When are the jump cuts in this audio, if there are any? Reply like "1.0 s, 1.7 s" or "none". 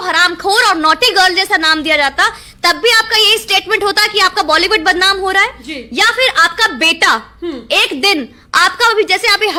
none